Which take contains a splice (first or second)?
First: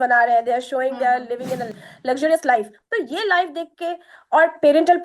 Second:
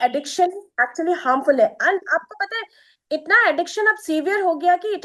first